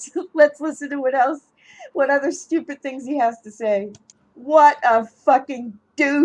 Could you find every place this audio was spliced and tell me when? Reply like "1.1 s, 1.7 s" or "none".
4.1 s